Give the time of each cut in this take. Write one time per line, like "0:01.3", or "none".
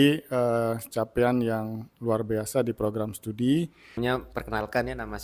0:03.8

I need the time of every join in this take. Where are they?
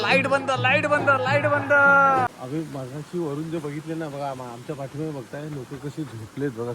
0:02.3

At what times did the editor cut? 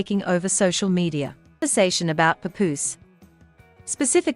0:01.7

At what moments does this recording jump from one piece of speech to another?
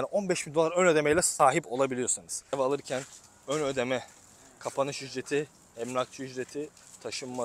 0:02.5

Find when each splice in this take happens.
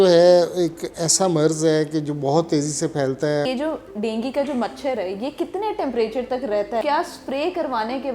0:03.4
0:06.8

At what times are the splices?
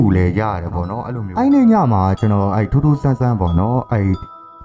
0:01.0

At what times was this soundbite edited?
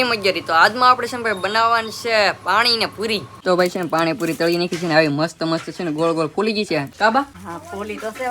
0:03.3
0:06.9
0:07.4

